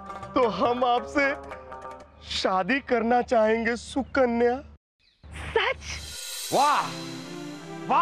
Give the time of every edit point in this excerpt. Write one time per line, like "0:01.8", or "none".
0:05.9